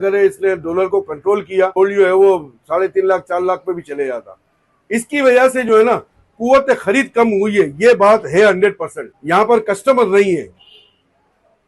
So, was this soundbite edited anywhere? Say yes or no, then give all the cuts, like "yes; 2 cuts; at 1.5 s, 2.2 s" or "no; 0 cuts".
yes; 1 cut; at 1.7 s